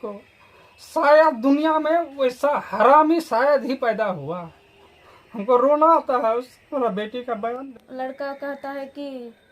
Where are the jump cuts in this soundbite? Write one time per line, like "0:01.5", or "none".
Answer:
0:07.7

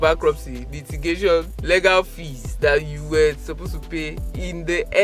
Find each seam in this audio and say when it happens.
0:01.5

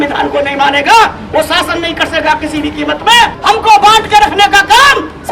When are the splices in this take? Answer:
0:03.4

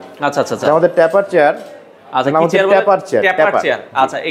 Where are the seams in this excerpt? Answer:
none

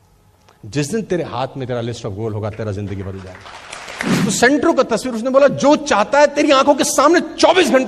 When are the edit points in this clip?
0:04.2

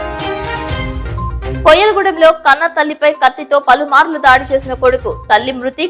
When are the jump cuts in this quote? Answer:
0:01.6

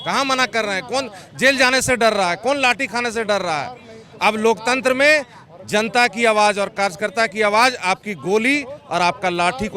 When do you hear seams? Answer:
none

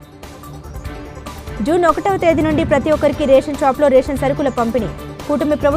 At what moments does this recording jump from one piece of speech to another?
0:01.3

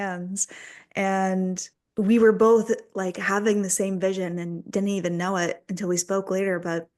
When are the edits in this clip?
0:01.7

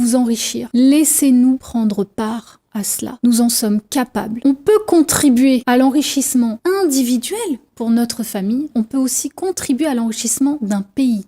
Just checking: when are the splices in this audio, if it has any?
0:04.3

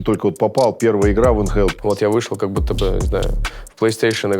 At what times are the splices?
0:01.7

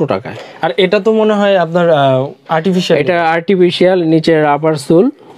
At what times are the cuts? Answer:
none

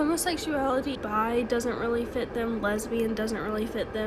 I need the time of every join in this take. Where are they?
0:01.0

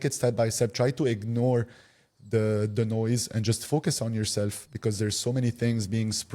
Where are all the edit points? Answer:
none

